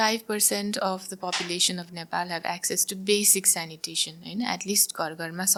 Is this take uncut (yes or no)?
yes